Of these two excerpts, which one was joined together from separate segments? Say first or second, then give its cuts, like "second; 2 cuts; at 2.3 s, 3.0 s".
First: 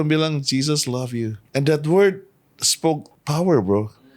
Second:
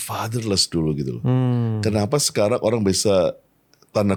first; 2 cuts; at 1.4 s, 3.1 s